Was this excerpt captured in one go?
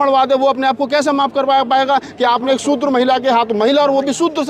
yes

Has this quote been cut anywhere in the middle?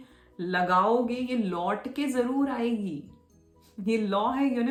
no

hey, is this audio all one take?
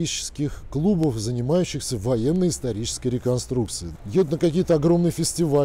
no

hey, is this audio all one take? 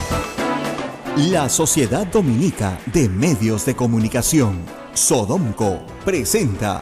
no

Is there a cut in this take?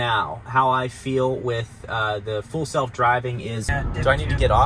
yes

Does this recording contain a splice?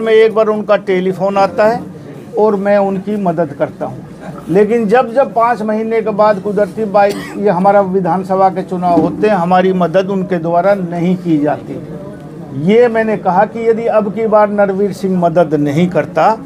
no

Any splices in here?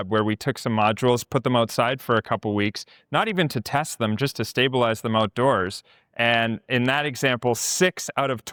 no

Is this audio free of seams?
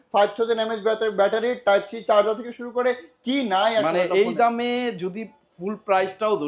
yes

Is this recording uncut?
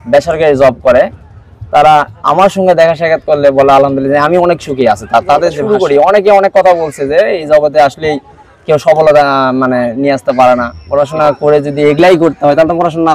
no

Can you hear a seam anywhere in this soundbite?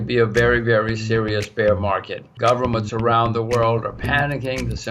yes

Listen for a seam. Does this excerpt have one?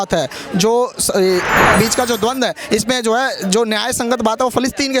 yes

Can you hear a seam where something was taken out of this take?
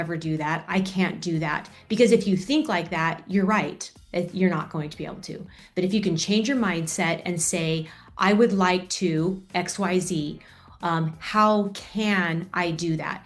no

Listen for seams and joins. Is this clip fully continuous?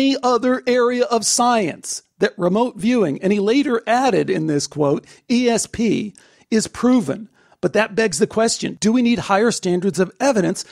yes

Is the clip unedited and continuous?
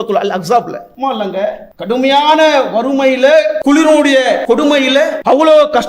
no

